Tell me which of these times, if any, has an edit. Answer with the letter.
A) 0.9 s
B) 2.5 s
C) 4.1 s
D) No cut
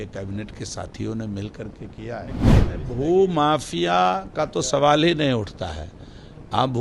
B